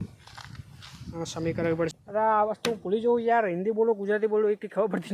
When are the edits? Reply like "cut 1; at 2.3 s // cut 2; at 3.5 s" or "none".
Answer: cut 1; at 1.9 s